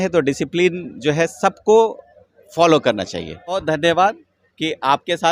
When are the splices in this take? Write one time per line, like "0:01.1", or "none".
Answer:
0:03.6